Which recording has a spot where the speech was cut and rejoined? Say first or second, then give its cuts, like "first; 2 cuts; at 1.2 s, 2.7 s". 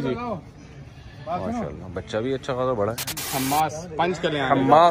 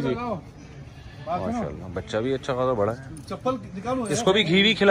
first; 1 cut; at 3.3 s